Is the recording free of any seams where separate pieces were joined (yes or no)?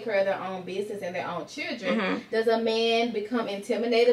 yes